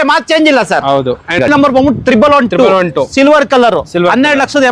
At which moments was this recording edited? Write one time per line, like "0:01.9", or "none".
0:01.4